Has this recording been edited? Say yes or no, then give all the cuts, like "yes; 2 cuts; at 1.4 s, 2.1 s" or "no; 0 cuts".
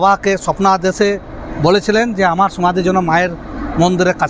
no; 0 cuts